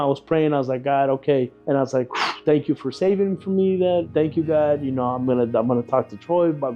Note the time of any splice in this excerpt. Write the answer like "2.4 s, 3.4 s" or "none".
1.6 s, 4.1 s